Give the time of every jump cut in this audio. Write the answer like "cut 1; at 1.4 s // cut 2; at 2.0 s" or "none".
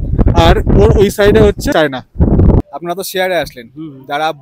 cut 1; at 1.7 s // cut 2; at 2.6 s